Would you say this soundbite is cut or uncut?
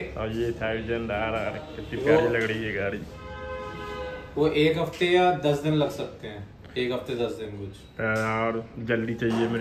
uncut